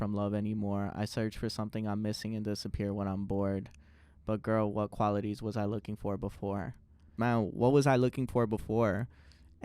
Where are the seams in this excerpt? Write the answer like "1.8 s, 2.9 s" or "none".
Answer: 7.1 s